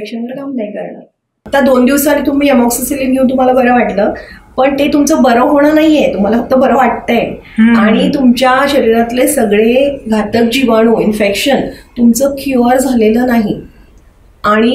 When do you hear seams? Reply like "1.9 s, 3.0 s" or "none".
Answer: 1.5 s